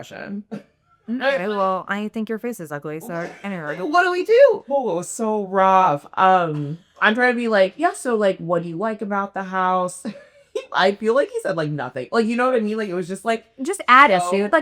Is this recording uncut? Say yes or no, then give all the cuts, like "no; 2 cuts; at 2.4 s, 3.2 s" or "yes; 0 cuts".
no; 1 cut; at 4.7 s